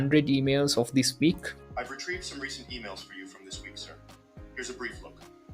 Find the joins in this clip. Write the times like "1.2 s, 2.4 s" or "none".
1.6 s